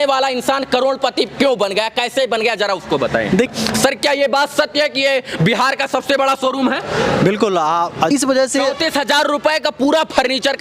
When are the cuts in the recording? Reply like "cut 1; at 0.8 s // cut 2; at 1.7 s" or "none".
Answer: cut 1; at 3.5 s // cut 2; at 8.1 s